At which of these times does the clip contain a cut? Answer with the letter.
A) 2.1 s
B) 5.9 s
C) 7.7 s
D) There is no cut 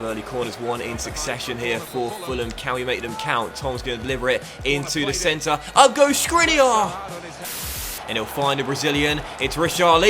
C